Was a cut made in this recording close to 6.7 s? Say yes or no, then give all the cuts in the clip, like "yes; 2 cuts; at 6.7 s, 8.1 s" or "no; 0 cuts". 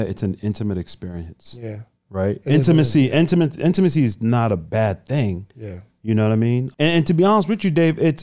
yes; 1 cut; at 6.7 s